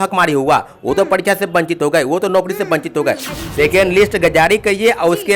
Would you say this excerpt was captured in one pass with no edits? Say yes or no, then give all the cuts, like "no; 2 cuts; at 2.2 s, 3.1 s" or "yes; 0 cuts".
no; 1 cut; at 3.3 s